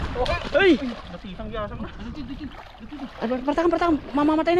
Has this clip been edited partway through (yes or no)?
no